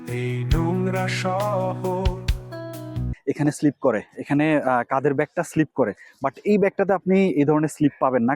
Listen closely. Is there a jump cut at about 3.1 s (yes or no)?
yes